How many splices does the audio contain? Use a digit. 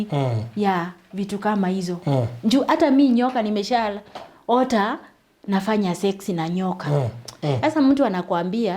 1